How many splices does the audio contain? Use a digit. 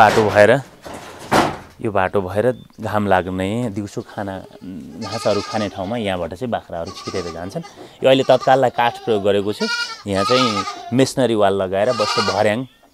0